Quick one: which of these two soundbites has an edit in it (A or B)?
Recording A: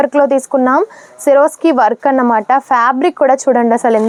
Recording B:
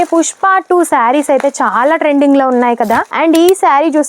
B